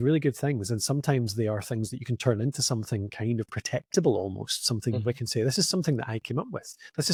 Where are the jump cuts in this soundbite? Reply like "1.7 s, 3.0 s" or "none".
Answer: none